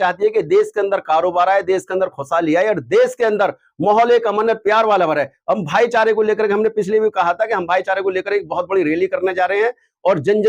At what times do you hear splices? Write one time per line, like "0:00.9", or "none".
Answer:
none